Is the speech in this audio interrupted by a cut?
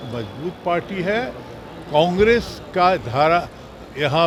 no; 0 cuts

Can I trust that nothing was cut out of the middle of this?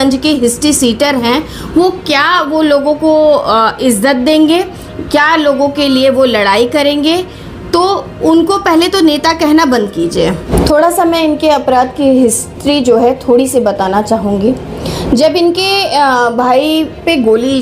yes; 0 cuts

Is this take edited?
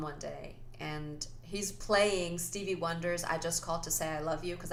no; 0 cuts

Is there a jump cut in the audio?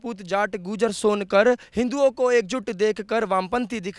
no; 0 cuts

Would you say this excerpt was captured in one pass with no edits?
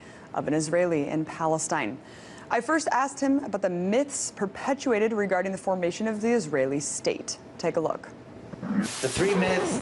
no; 1 cut; at 2.2 s

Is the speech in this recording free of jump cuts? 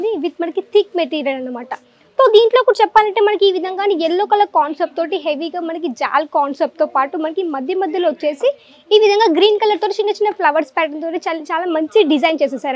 yes; 0 cuts

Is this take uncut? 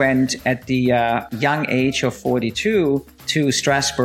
no; 2 cuts; at 1.3 s, 3.2 s

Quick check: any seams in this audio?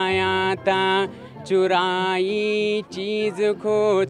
no; 0 cuts

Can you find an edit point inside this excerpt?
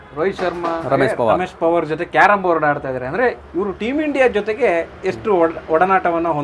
no; 0 cuts

